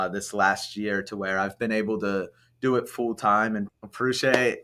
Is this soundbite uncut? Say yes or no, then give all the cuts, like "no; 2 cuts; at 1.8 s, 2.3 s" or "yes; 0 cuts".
no; 1 cut; at 3.7 s